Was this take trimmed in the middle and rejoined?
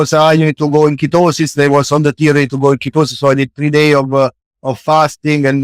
no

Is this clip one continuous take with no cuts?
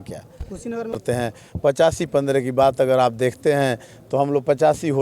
no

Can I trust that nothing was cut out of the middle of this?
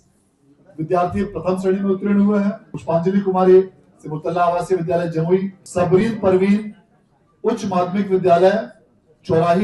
no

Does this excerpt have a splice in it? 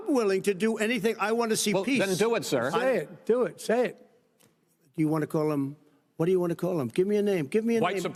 no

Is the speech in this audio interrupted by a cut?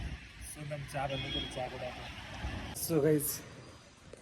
yes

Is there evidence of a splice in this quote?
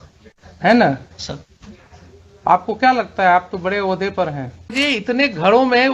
yes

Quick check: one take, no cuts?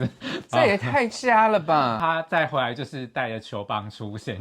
no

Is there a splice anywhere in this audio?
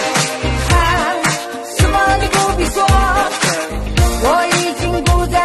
yes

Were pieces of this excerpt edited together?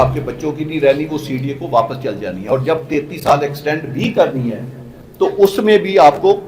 no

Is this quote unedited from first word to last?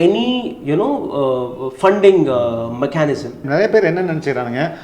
no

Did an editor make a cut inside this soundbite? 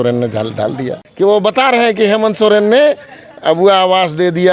yes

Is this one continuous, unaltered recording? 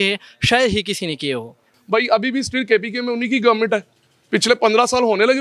no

